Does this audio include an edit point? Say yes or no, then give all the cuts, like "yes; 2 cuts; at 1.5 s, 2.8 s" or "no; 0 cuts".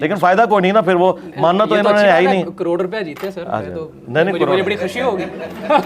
no; 0 cuts